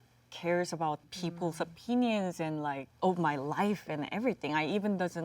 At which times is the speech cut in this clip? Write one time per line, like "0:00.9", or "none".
0:01.0
0:02.9